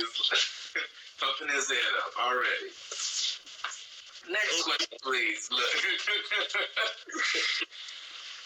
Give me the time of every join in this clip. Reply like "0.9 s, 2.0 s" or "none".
none